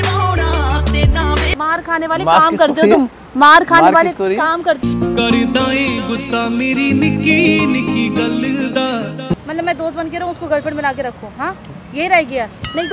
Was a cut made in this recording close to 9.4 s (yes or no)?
yes